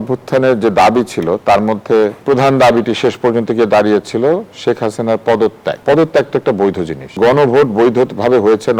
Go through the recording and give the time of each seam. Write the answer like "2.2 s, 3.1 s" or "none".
2.2 s, 5.8 s, 7.2 s